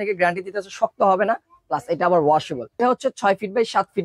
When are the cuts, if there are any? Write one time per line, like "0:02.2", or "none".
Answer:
0:02.8

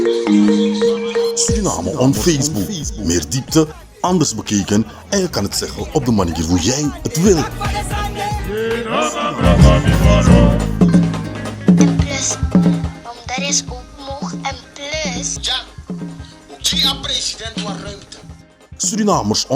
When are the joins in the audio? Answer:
0:01.2

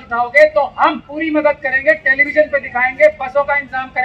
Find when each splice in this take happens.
0:01.1

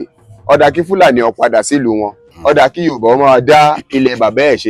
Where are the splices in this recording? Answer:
none

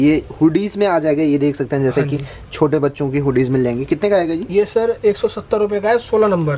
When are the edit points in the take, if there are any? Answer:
none

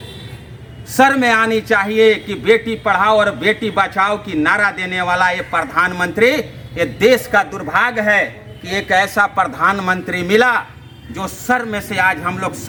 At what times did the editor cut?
none

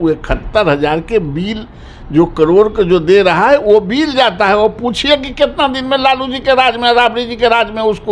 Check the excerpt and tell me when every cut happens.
none

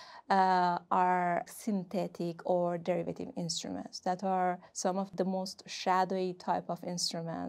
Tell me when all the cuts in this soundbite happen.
0:01.5
0:05.1

